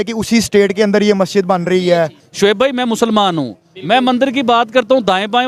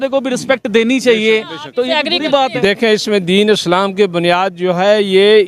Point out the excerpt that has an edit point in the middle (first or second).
first